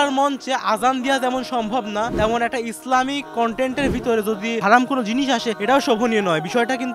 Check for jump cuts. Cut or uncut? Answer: uncut